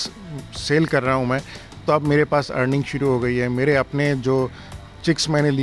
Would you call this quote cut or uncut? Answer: uncut